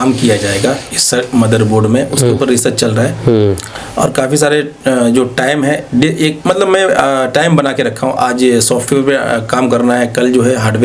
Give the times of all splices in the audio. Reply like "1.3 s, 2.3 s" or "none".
none